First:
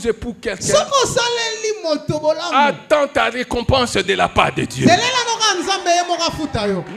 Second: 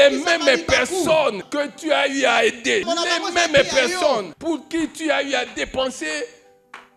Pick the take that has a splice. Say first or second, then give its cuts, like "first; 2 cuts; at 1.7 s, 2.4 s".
second; 3 cuts; at 1.4 s, 2.8 s, 4.3 s